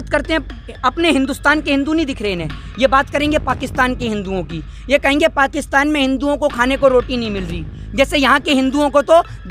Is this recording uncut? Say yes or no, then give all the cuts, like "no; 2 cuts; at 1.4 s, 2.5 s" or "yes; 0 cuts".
yes; 0 cuts